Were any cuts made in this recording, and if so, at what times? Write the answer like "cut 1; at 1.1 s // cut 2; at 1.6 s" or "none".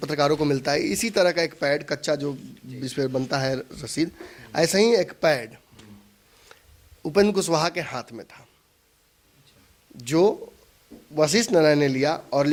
none